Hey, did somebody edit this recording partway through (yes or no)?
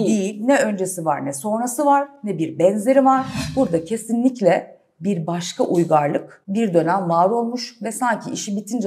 yes